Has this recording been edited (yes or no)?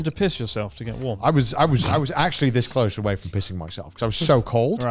no